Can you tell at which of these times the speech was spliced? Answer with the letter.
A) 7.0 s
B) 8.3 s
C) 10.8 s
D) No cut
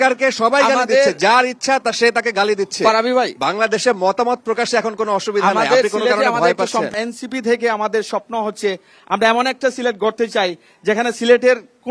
A